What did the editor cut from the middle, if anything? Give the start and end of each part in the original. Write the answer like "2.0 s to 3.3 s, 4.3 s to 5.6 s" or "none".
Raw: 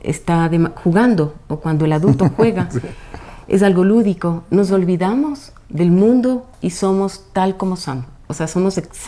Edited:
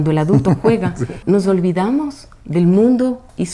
2.9 s to 4.4 s